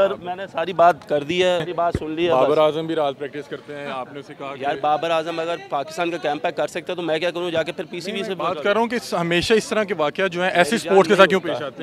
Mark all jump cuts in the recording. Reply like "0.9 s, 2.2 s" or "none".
1.7 s